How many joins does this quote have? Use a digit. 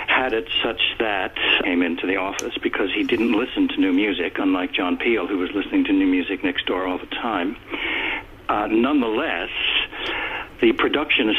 0